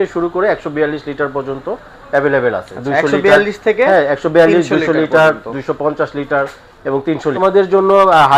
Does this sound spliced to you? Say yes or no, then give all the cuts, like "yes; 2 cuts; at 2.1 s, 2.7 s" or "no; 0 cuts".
yes; 1 cut; at 7.4 s